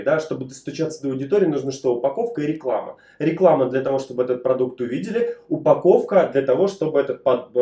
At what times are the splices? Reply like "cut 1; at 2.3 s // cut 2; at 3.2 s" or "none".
none